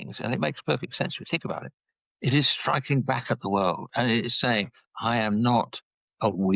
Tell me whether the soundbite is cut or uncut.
uncut